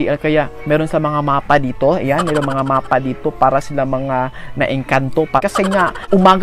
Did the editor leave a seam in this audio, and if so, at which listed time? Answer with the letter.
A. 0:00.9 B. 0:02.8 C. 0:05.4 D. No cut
C